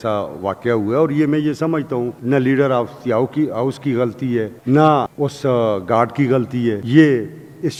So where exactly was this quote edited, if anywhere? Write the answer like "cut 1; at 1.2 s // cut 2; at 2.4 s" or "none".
none